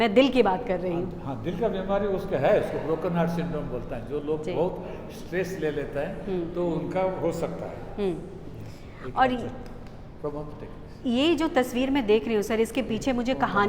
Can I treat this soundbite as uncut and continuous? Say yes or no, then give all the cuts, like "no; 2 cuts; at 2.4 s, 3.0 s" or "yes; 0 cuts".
yes; 0 cuts